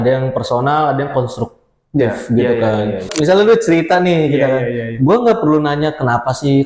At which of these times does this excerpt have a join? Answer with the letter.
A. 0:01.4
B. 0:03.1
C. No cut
B